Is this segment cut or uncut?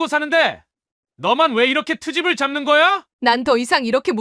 cut